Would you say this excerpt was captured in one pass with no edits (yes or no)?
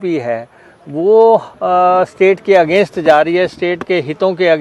yes